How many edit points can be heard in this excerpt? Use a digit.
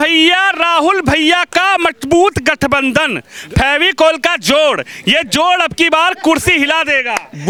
0